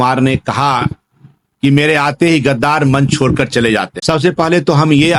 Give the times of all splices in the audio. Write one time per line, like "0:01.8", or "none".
none